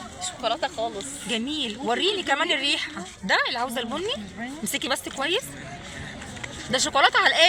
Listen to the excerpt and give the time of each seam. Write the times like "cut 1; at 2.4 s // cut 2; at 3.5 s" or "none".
none